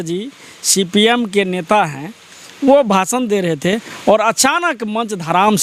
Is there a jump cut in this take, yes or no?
no